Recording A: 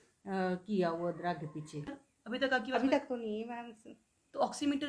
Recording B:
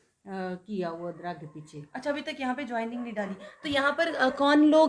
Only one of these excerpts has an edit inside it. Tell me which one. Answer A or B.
A